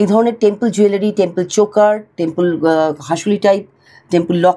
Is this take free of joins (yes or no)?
yes